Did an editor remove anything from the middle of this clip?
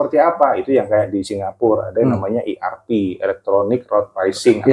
no; 0 cuts

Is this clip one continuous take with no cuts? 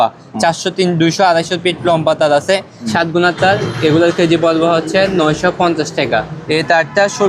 no; 2 cuts; at 2.8 s, 6.4 s

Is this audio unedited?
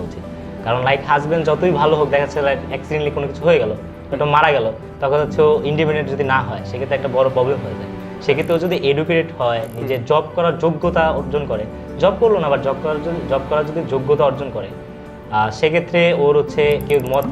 yes; 0 cuts

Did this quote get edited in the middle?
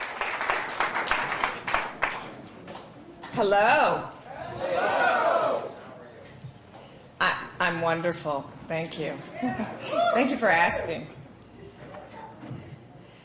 no; 0 cuts

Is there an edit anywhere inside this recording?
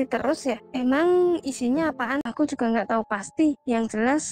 yes; 1 cut; at 2.2 s

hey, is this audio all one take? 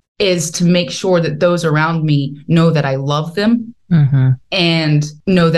yes; 0 cuts

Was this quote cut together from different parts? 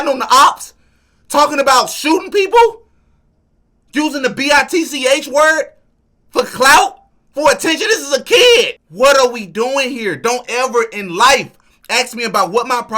yes; 1 cut; at 8.8 s

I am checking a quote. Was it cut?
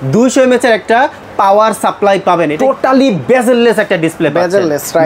yes; 1 cut; at 2.5 s

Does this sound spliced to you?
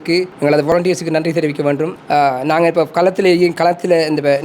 yes; 1 cut; at 2.0 s

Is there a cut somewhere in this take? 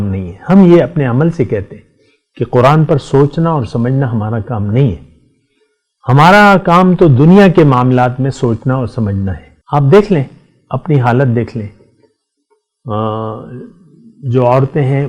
yes; 1 cut; at 9.5 s

